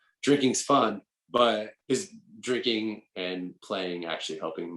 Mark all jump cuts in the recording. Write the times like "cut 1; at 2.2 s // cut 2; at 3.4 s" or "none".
cut 1; at 3.6 s